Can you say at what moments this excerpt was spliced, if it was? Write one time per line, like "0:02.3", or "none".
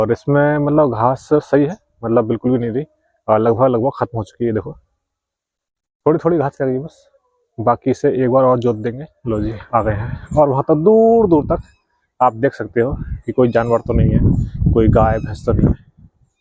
0:09.1